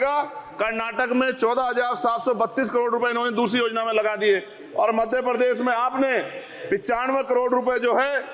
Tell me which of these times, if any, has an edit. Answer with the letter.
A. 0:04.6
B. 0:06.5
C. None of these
C